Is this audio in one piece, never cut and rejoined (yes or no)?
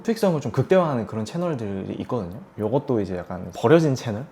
yes